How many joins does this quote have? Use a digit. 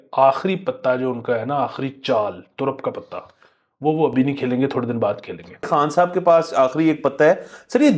1